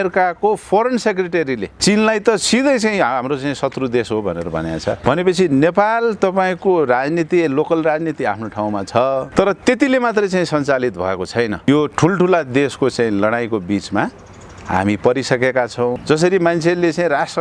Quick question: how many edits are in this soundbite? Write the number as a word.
five